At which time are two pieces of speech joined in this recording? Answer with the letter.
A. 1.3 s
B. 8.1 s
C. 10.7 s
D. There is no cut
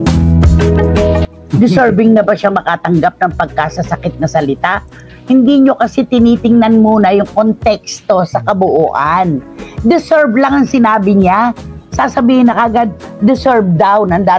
A